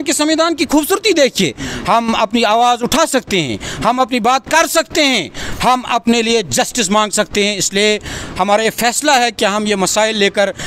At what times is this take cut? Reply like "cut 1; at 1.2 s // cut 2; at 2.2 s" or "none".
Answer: none